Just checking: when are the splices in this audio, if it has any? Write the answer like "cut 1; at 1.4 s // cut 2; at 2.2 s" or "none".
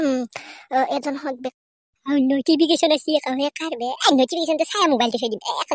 cut 1; at 1.6 s